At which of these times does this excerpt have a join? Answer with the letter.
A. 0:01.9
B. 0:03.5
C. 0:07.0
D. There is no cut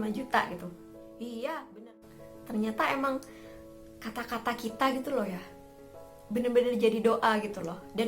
A